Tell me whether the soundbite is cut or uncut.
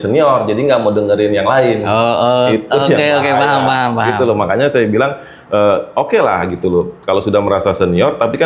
uncut